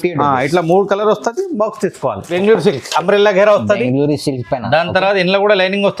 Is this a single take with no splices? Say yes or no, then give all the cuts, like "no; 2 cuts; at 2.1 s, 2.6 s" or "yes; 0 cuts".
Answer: no; 1 cut; at 2.3 s